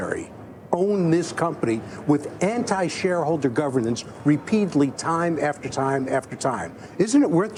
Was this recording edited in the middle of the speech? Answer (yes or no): no